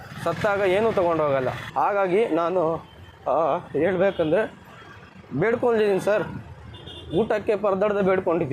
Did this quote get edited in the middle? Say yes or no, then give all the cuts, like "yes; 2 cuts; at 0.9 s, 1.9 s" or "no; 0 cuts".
yes; 1 cut; at 1.6 s